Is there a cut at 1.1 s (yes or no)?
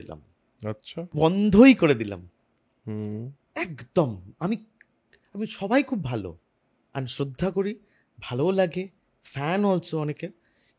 yes